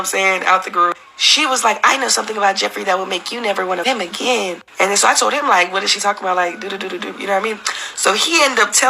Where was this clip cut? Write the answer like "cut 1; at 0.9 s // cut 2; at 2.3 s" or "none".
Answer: cut 1; at 3.8 s